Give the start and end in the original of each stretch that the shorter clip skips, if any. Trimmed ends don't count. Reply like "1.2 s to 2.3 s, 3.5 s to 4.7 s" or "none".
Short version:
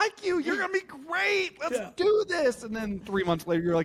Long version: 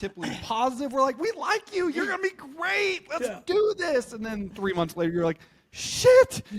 none

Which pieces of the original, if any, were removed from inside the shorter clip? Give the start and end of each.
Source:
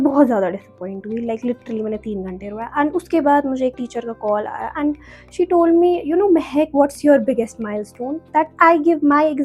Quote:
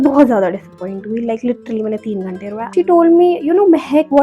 2.6 s to 5.2 s

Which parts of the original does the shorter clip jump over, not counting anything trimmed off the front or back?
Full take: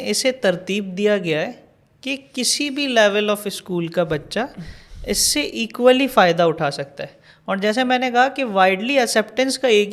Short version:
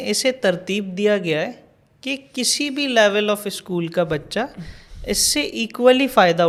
none

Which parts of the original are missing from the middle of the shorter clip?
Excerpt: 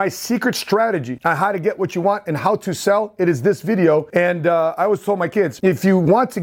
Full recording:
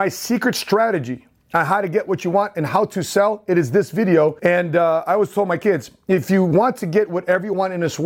1.1 s to 1.4 s, 5.8 s to 6.0 s

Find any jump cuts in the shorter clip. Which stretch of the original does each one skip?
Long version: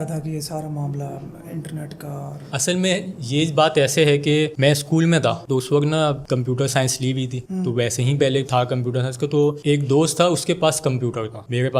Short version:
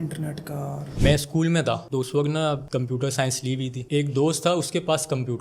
2.5 s to 4.5 s, 7.4 s to 9.6 s

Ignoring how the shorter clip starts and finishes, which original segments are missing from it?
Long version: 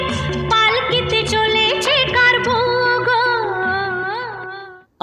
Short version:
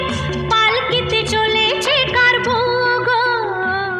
none

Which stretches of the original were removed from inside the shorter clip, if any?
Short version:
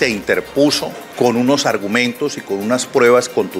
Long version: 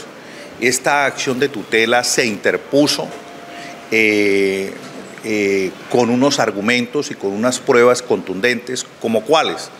3.2 s to 5.8 s

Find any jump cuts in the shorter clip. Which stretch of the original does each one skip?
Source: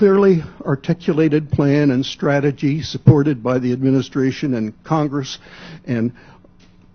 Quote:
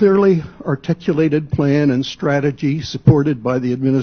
none

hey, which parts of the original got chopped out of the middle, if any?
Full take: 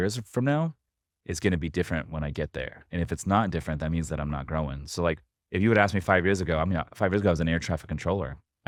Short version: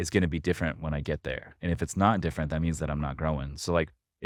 none

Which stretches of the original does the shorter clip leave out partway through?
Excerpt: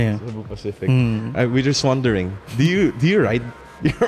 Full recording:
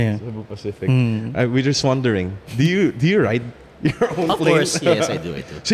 none

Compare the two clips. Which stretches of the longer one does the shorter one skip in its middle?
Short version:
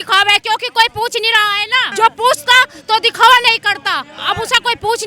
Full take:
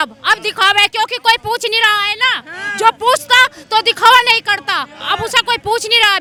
2.3 s to 2.6 s

